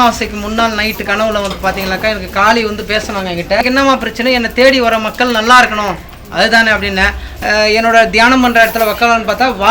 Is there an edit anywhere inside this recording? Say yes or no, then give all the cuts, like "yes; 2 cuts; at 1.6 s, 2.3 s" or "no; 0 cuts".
yes; 2 cuts; at 3.6 s, 7.2 s